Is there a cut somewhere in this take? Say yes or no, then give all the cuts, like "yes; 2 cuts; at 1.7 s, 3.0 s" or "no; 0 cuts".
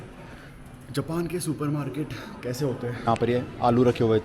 yes; 1 cut; at 3.1 s